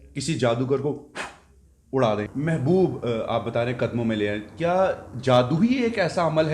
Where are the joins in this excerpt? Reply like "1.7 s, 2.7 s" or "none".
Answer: 2.3 s